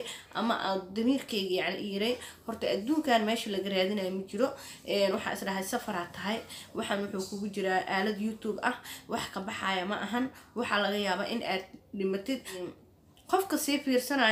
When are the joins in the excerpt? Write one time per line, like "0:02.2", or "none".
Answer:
0:12.6